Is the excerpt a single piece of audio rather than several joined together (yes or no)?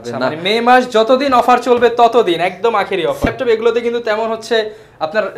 no